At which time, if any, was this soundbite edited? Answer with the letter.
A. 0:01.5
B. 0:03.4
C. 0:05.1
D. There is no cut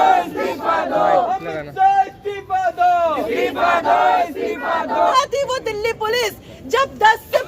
C